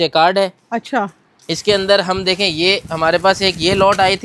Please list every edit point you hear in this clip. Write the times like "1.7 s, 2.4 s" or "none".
none